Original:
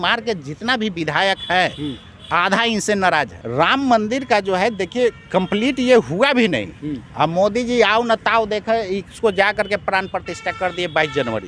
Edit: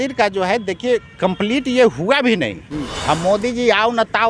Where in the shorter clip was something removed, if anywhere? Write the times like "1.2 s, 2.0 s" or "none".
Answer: none